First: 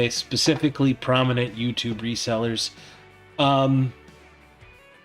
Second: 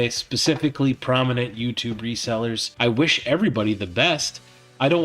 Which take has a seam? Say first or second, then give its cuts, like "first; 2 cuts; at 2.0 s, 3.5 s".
second; 1 cut; at 2.7 s